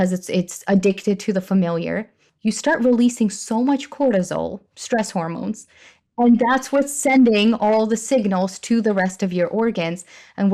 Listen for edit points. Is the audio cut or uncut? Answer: cut